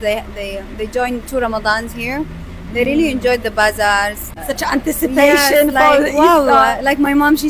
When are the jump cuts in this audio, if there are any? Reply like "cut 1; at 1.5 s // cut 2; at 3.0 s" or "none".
none